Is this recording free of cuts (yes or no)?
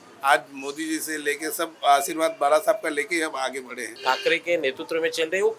no